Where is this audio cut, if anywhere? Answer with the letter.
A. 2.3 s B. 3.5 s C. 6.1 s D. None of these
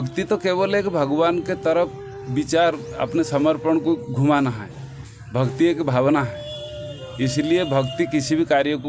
D